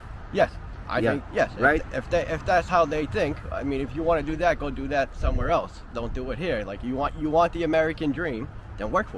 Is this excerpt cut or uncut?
uncut